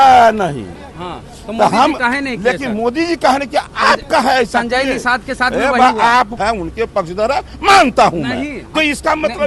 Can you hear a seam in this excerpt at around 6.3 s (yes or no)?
yes